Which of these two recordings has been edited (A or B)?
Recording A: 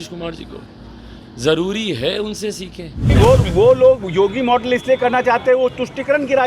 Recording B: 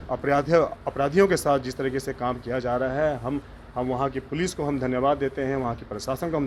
A